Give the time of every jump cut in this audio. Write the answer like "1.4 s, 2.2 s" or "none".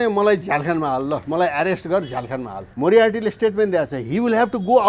2.6 s

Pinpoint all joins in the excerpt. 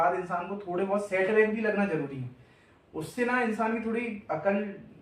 none

